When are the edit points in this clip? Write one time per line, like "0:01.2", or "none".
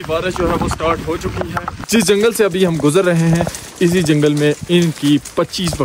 0:01.8